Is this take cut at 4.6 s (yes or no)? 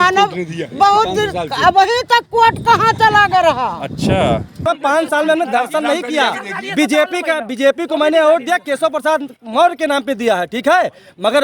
yes